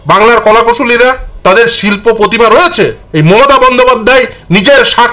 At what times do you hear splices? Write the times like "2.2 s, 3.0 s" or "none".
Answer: 1.3 s, 3.0 s